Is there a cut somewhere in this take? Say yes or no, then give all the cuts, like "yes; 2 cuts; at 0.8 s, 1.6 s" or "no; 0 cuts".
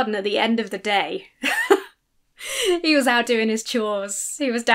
no; 0 cuts